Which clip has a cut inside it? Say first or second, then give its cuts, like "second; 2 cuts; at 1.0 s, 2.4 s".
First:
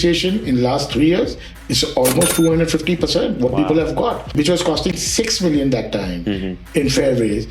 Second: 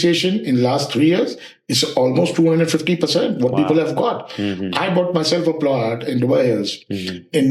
first; 1 cut; at 4.3 s